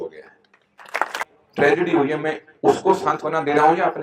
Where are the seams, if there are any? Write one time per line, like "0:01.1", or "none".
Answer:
0:01.2